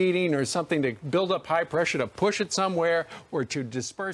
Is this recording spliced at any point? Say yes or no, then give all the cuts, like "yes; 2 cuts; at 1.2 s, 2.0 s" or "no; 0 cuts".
no; 0 cuts